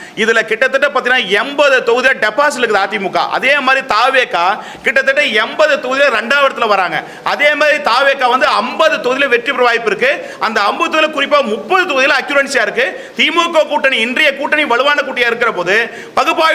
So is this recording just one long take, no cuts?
yes; 0 cuts

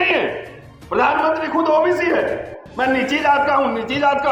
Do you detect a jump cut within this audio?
no; 0 cuts

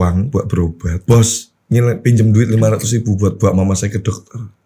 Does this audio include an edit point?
yes; 1 cut; at 1.0 s

